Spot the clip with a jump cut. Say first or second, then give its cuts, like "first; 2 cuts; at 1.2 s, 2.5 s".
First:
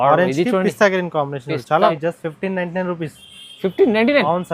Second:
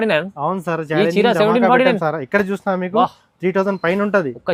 first; 1 cut; at 1.9 s